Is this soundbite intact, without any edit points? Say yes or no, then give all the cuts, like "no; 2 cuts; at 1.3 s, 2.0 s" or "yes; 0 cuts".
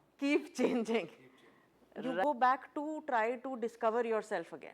no; 1 cut; at 2.2 s